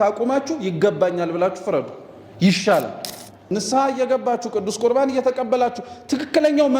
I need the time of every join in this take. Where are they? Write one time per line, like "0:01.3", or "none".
0:03.5